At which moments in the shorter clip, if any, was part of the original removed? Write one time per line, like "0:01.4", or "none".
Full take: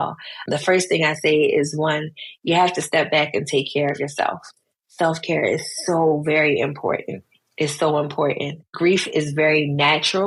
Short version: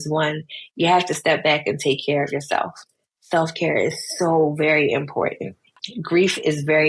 0:05.9